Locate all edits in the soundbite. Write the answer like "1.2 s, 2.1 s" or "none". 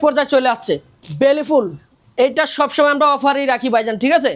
1.0 s